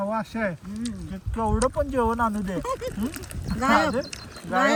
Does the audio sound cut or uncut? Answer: uncut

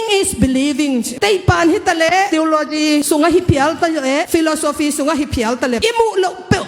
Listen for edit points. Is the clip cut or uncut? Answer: cut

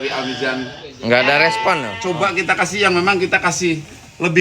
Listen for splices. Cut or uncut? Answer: cut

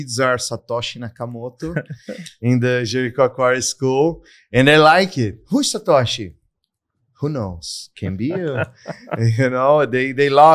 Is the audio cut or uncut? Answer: uncut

